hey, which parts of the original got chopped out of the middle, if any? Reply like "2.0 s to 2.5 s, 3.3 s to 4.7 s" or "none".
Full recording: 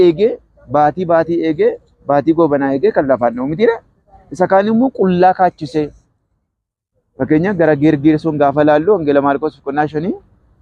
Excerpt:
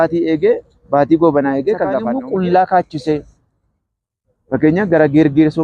3.3 s to 4.8 s